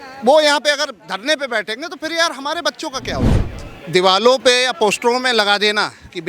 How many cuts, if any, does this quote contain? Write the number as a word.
one